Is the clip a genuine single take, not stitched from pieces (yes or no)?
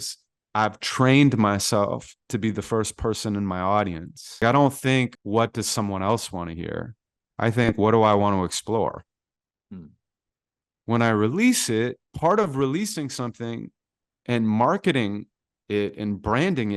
no